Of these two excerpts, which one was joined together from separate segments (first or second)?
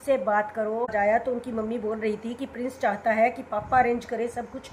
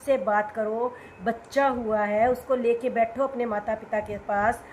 first